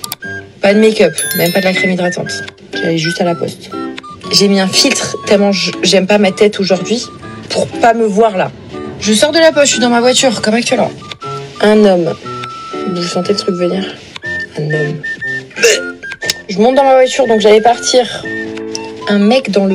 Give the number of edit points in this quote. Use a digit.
2